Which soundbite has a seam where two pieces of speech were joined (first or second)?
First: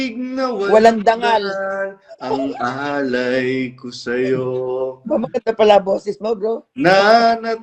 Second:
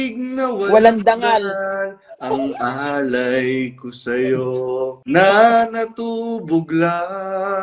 second